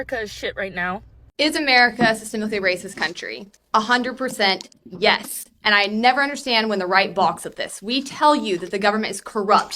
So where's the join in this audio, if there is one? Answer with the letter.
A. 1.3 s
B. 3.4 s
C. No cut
A